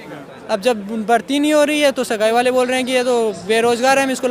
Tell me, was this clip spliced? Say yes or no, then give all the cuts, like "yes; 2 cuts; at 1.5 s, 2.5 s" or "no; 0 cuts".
no; 0 cuts